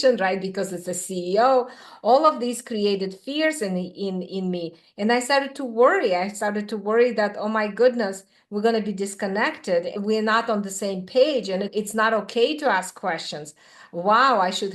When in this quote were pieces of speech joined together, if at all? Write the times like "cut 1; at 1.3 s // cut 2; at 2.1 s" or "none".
cut 1; at 10.0 s // cut 2; at 11.7 s